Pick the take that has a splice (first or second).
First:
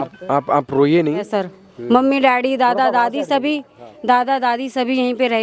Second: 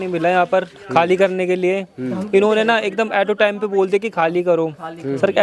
first